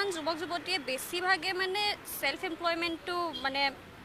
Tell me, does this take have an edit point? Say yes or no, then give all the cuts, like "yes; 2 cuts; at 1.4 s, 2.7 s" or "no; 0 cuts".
no; 0 cuts